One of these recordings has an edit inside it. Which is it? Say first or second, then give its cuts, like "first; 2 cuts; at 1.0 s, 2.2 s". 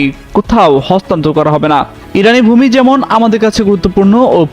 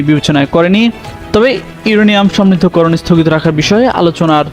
first; 1 cut; at 2.0 s